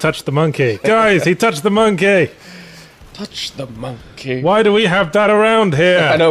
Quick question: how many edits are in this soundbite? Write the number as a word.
one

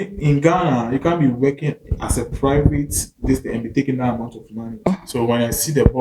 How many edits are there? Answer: one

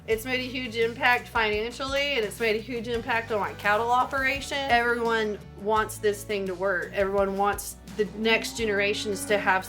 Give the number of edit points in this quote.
two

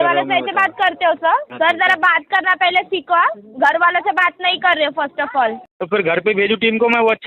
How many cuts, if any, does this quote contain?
two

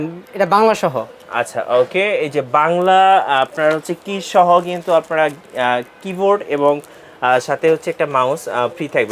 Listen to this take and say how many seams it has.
zero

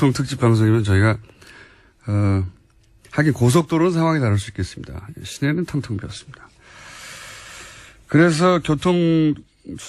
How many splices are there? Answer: one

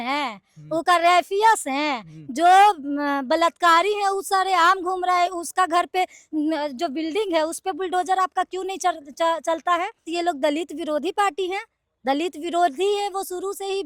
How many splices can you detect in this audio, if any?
one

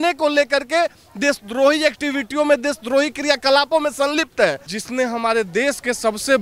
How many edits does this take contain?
one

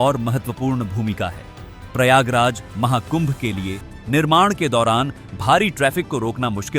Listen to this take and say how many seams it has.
one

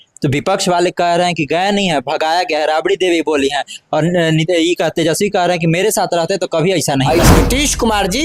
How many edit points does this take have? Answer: one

